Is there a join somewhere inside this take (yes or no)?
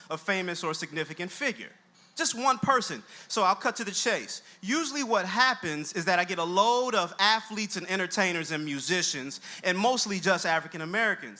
no